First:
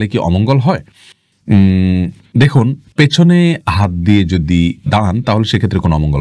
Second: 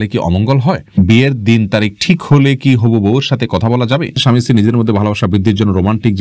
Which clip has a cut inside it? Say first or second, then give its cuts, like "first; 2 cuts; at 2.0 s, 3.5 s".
second; 2 cuts; at 1.0 s, 4.1 s